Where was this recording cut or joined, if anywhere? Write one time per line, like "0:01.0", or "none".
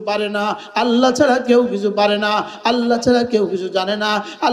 none